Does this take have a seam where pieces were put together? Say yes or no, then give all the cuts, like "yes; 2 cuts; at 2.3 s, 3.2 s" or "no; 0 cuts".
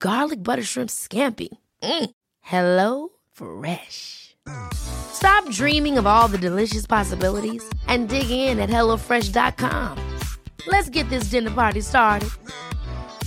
no; 0 cuts